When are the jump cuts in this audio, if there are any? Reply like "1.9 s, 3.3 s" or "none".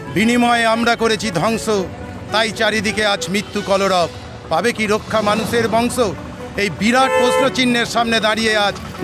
none